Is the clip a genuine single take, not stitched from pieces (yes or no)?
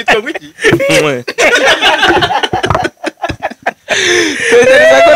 yes